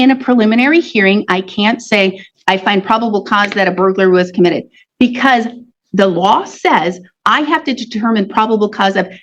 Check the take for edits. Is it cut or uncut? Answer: uncut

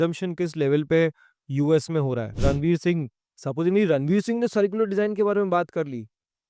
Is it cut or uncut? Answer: cut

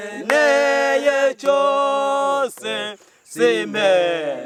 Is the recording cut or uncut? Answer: uncut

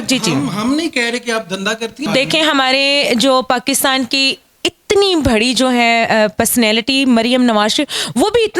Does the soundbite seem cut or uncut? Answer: cut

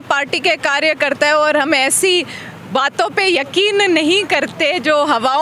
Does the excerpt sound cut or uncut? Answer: uncut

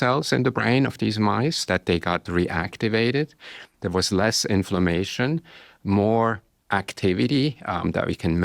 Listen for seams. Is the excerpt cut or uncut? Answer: uncut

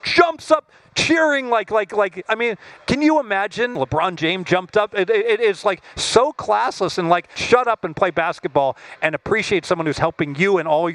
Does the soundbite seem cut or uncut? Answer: cut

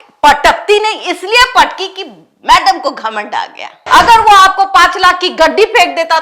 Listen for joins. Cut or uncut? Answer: cut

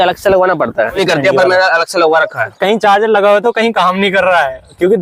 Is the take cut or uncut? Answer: cut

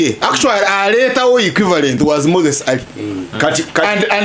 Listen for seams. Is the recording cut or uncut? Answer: uncut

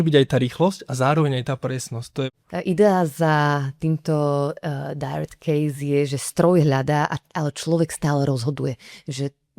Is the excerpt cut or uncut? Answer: cut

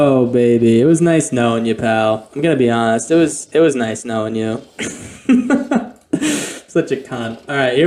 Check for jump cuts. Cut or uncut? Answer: uncut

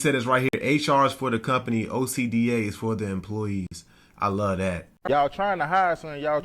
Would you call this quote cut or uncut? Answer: cut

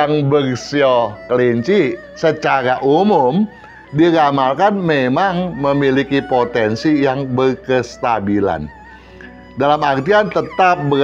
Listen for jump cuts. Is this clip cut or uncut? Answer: uncut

